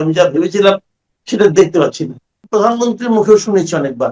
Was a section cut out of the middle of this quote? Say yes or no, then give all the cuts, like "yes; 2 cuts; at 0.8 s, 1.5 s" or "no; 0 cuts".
yes; 1 cut; at 2.3 s